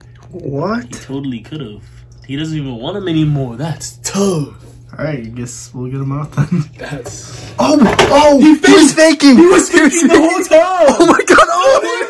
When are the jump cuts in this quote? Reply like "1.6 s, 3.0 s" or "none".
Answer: none